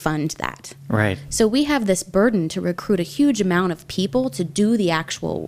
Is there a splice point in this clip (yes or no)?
no